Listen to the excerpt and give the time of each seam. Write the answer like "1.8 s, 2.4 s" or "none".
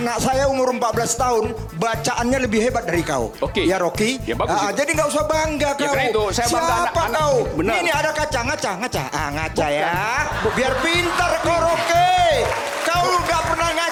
none